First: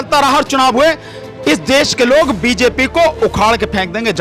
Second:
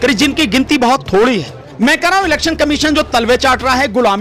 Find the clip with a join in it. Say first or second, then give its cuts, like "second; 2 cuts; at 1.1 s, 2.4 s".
second; 1 cut; at 1.6 s